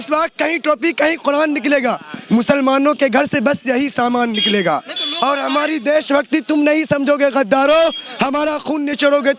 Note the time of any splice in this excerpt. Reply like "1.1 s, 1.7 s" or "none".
none